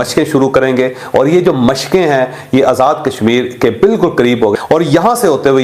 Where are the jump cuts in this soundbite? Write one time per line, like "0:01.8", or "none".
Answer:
0:04.5